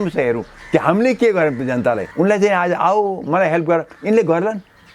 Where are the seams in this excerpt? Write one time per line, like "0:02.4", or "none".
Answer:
0:02.1